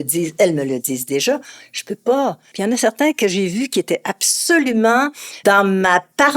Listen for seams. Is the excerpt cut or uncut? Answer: cut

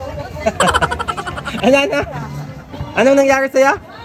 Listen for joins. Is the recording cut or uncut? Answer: uncut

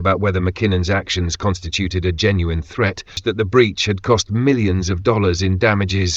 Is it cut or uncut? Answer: cut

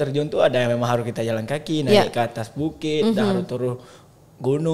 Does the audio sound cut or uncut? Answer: uncut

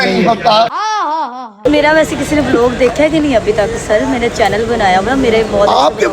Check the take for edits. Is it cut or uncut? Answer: cut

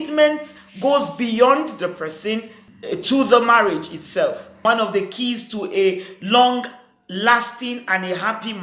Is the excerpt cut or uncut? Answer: cut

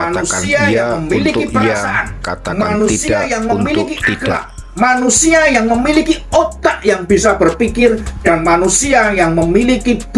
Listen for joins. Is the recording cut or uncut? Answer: uncut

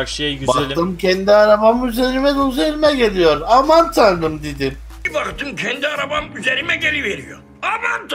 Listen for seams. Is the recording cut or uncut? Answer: uncut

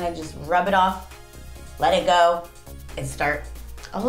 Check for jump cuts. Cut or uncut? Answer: uncut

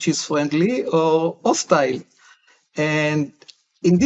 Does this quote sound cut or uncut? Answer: uncut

